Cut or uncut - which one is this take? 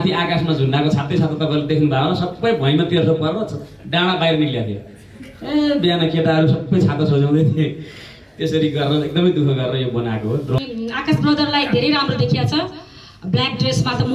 cut